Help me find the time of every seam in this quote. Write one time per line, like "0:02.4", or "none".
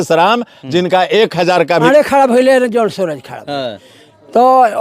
0:01.9